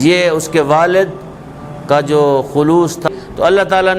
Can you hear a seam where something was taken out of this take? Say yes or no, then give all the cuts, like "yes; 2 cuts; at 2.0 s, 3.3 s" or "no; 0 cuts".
yes; 1 cut; at 3.1 s